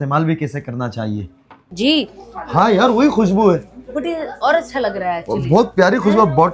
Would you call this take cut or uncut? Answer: cut